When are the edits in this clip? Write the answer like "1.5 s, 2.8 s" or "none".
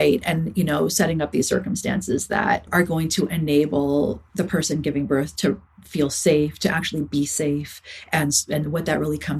2.7 s, 4.2 s